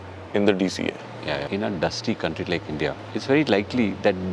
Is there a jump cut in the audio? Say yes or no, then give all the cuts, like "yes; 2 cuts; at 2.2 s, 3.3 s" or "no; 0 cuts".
yes; 2 cuts; at 1.4 s, 3.0 s